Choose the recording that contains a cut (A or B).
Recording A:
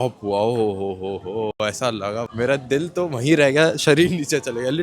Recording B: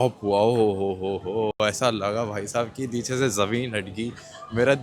A